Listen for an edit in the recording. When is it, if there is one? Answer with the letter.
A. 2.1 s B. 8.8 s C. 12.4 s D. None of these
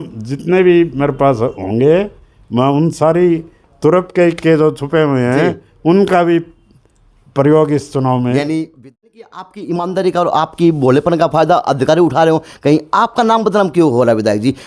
B